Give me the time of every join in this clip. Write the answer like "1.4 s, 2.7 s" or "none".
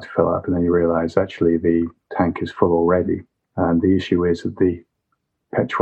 none